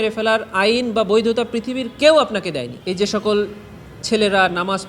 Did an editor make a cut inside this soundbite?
yes; 1 cut; at 2.7 s

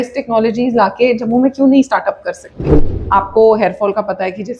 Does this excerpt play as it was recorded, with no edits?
no; 1 cut; at 2.9 s

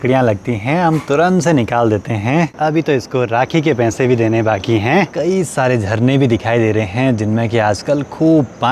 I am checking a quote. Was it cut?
yes; 2 cuts; at 2.5 s, 5.1 s

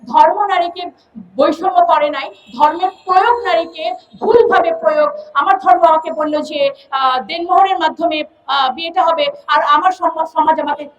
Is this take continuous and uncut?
yes; 0 cuts

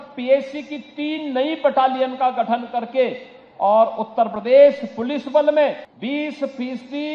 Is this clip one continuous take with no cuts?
no; 1 cut; at 5.9 s

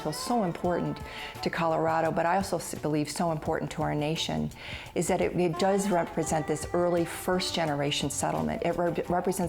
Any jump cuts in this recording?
no; 0 cuts

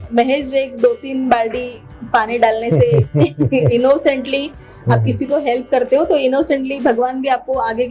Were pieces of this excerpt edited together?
no; 0 cuts

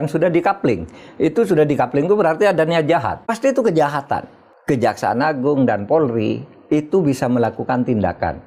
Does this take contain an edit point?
yes; 1 cut; at 3.3 s

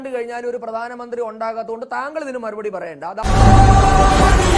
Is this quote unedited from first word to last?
no; 1 cut; at 3.2 s

